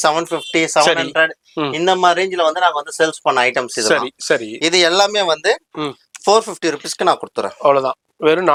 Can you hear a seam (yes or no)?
no